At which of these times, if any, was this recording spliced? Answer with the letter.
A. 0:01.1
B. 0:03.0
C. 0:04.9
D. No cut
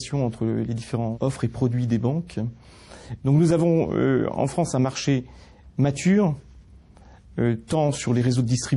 D